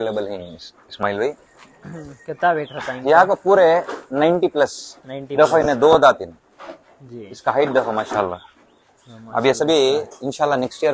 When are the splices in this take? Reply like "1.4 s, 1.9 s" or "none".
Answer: none